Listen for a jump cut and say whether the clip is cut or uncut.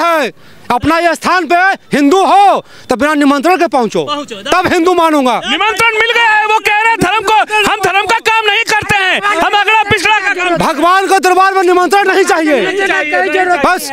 uncut